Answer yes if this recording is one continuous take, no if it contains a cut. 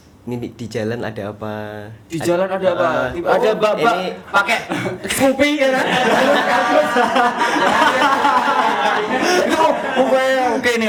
yes